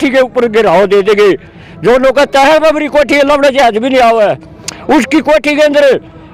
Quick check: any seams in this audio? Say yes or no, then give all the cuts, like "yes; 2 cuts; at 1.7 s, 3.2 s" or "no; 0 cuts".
no; 0 cuts